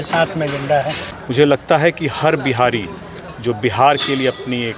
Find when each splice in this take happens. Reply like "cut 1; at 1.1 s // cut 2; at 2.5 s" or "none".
cut 1; at 1.0 s